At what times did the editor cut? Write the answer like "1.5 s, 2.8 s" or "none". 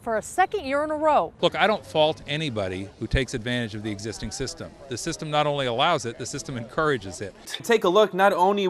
1.3 s, 7.5 s